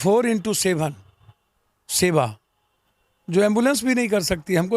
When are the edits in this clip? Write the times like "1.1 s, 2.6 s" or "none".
none